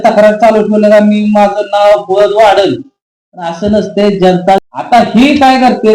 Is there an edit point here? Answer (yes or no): yes